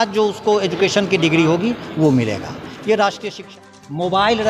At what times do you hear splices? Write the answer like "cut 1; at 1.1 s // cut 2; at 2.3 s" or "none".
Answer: cut 1; at 3.5 s